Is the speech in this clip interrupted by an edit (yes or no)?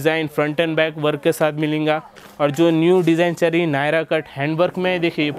no